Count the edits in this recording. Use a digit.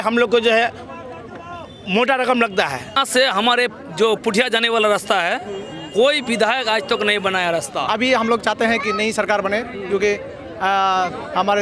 2